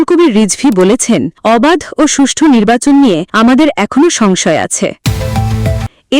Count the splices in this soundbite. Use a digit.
1